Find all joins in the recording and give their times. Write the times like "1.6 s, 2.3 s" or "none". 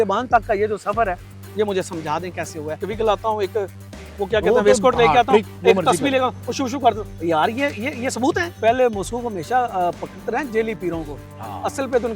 2.9 s, 8.5 s